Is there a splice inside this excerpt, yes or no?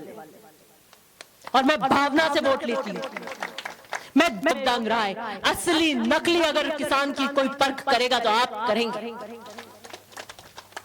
yes